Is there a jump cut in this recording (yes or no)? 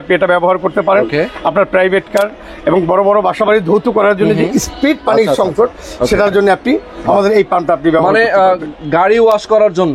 no